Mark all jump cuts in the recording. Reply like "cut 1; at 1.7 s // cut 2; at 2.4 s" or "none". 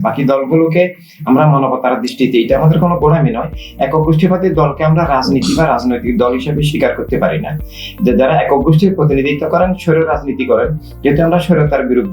none